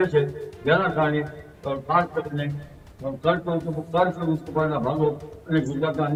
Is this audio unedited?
yes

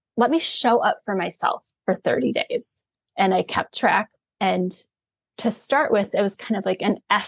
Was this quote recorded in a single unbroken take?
no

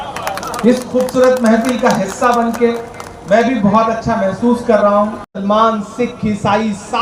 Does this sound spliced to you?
yes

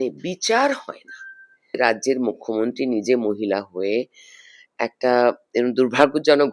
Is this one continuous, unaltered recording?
no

